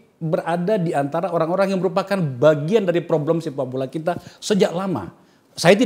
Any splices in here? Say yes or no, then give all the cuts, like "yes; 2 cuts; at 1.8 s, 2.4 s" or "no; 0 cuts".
no; 0 cuts